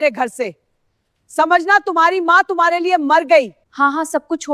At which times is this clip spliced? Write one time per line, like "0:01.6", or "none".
0:03.6